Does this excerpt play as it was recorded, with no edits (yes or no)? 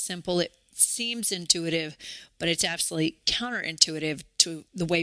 yes